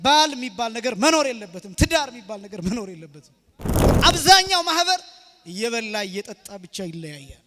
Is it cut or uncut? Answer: cut